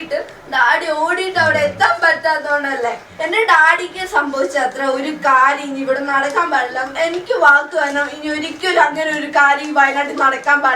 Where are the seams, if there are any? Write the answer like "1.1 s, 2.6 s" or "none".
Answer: 3.1 s, 6.8 s